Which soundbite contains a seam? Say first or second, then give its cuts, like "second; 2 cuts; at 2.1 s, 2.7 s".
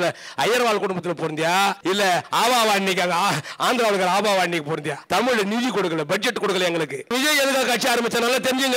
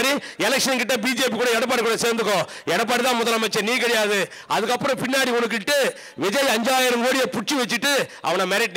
first; 3 cuts; at 1.8 s, 4.9 s, 7.1 s